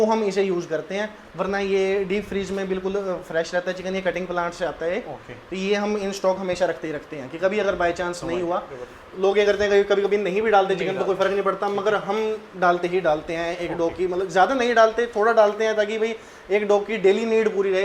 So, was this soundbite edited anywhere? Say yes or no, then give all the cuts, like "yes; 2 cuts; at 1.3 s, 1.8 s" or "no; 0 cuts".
no; 0 cuts